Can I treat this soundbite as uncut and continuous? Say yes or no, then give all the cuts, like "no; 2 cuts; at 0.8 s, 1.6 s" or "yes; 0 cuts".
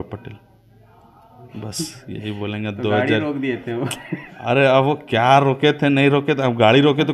yes; 0 cuts